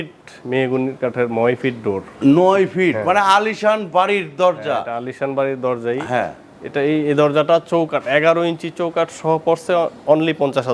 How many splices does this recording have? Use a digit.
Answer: 0